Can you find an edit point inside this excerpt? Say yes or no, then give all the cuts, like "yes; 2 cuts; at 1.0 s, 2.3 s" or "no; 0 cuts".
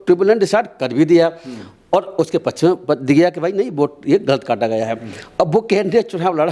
no; 0 cuts